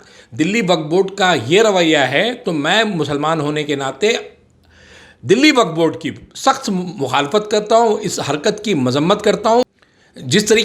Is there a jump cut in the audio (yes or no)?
yes